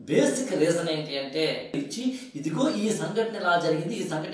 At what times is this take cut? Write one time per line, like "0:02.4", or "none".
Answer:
0:01.8